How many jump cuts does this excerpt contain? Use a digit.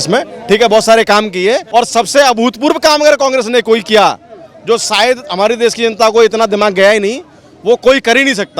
1